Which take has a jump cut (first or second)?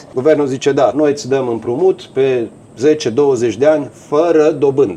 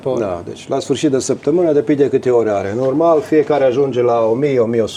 first